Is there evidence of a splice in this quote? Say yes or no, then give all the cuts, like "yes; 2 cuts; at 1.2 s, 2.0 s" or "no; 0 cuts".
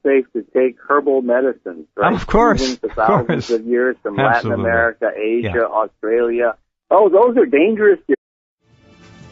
no; 0 cuts